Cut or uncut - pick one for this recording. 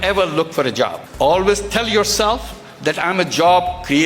cut